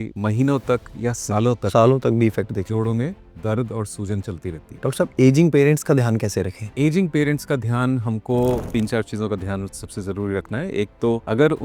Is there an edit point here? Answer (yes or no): yes